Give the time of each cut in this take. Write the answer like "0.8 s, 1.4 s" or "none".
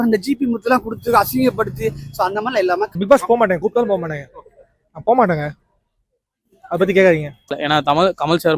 3.0 s, 7.4 s